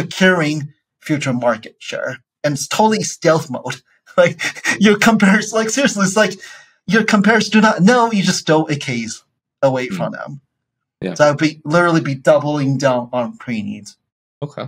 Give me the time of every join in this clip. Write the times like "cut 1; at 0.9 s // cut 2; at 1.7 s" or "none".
none